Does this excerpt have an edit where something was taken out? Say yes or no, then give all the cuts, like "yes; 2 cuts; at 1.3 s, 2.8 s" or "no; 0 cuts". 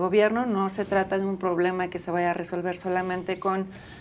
no; 0 cuts